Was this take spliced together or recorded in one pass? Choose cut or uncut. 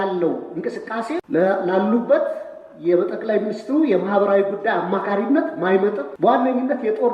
cut